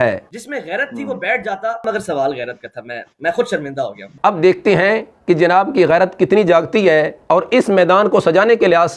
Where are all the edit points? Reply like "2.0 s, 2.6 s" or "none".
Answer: none